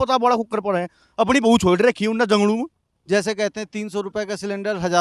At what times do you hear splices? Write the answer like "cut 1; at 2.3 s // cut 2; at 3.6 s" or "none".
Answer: cut 1; at 2.9 s